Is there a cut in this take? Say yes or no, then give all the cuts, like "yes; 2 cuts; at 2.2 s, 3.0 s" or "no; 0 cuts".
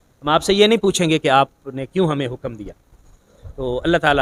no; 0 cuts